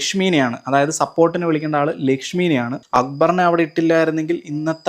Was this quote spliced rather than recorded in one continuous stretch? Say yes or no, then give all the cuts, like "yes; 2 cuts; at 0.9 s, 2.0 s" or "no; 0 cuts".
yes; 1 cut; at 2.8 s